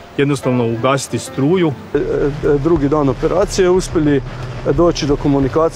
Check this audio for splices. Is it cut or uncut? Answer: cut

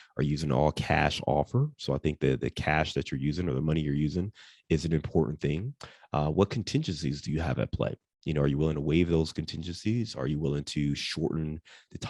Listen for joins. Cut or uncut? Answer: uncut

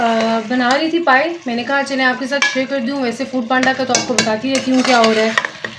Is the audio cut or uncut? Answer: uncut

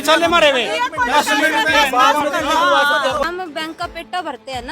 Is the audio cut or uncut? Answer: cut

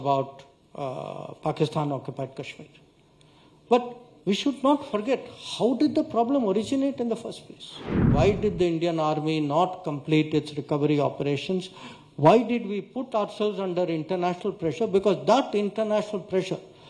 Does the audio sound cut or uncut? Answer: cut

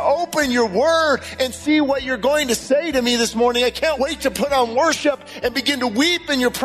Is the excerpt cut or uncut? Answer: cut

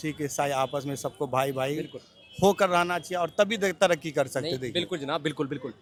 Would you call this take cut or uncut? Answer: uncut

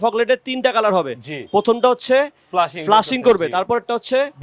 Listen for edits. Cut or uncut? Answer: uncut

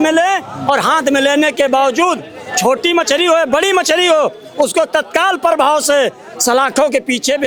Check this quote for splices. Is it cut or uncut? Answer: uncut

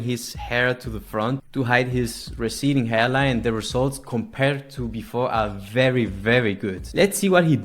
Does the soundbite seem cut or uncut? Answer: uncut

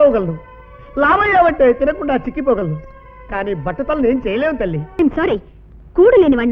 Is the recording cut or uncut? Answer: cut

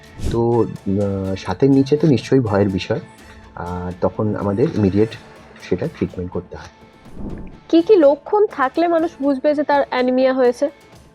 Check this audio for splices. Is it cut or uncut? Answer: uncut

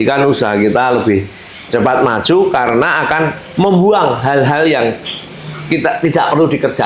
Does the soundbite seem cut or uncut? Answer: uncut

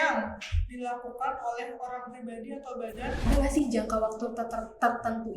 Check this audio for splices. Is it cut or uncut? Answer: cut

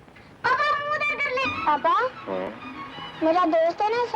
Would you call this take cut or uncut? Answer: cut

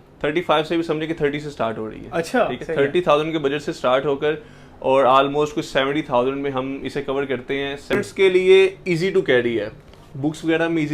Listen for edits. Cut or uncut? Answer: cut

